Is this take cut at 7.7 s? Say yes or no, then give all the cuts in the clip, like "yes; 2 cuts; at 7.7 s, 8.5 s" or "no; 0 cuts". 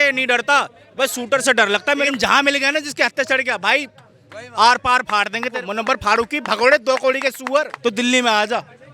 yes; 3 cuts; at 2.1 s, 5.6 s, 7.7 s